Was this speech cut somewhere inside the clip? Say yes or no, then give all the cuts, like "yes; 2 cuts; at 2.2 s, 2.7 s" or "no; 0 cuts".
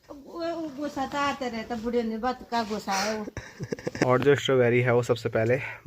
yes; 1 cut; at 3.9 s